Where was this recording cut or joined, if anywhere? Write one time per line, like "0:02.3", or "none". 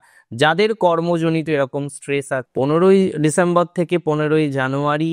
0:02.5